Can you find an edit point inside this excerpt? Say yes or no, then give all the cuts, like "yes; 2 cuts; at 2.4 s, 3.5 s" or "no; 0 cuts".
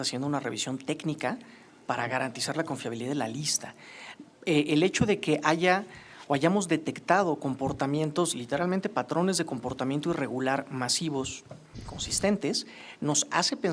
no; 0 cuts